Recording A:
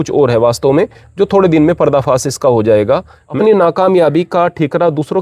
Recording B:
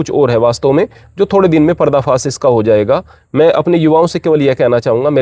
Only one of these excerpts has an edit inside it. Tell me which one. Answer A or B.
A